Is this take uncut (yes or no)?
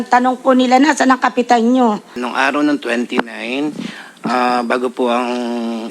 no